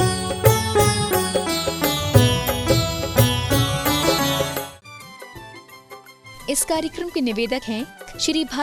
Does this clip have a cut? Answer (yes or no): yes